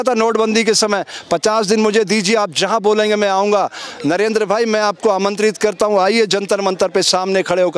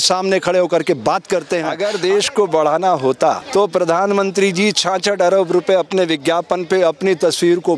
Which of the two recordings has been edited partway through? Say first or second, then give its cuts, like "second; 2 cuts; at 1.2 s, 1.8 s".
second; 2 cuts; at 1.7 s, 3.4 s